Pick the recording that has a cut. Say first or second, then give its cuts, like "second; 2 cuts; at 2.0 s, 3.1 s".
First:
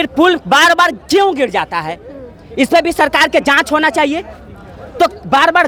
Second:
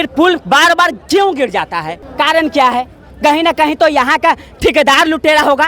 second; 1 cut; at 2.0 s